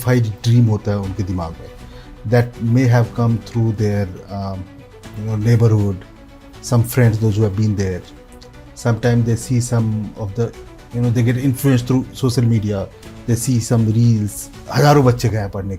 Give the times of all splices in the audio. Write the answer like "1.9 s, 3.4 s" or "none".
14.5 s